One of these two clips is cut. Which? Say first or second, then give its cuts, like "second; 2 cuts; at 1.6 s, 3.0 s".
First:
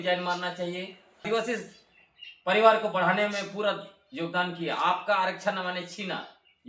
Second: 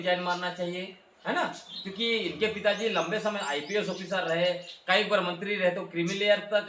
first; 1 cut; at 1.3 s